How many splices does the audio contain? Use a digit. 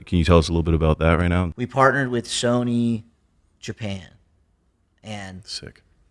1